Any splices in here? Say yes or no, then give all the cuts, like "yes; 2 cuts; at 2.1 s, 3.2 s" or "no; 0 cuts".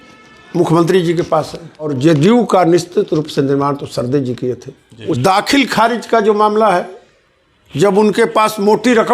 yes; 2 cuts; at 1.9 s, 5.1 s